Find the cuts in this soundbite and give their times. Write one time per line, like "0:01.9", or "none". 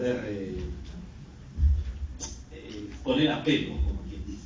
0:02.7